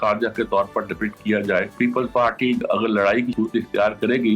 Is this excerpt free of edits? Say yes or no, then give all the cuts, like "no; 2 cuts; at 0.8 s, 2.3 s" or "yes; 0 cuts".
no; 3 cuts; at 1.7 s, 2.6 s, 3.3 s